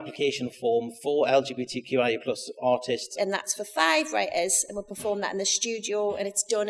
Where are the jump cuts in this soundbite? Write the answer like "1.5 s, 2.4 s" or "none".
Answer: 3.1 s

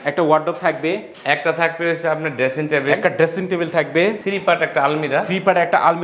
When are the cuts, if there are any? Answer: 1.1 s, 4.2 s

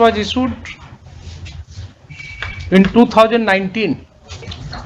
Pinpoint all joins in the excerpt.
none

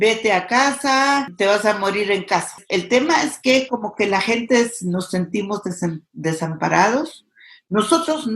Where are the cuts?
1.3 s, 2.6 s

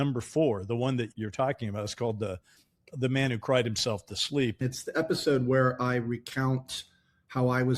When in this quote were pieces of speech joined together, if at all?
1.1 s, 4.6 s

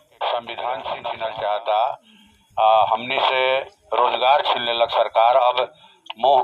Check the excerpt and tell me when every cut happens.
1.1 s

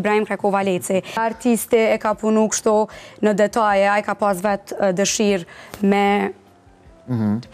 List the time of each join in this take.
1.2 s

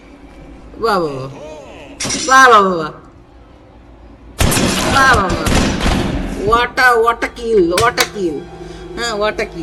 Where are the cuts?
none

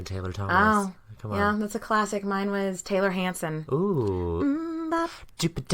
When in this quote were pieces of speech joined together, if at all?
3.6 s

